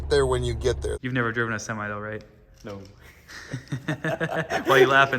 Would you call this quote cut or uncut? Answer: cut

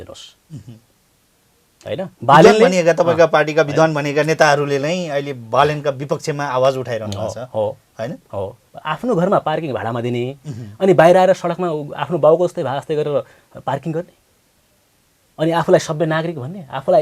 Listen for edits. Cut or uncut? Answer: cut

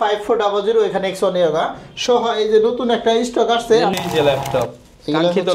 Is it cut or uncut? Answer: cut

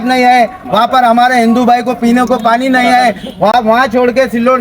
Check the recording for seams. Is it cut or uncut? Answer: cut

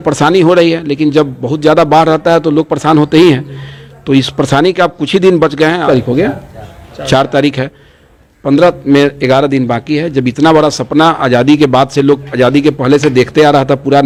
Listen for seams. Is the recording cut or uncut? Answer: uncut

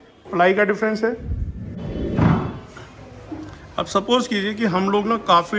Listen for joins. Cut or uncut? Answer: cut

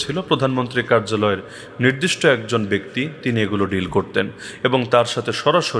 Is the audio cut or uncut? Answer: uncut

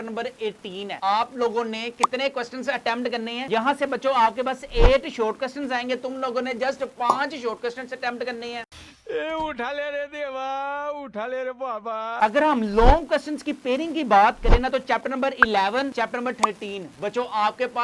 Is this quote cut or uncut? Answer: uncut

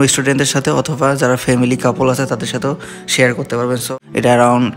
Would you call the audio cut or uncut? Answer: cut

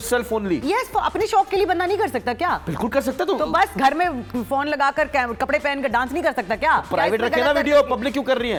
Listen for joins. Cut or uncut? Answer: uncut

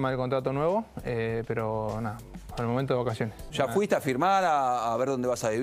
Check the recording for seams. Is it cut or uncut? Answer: uncut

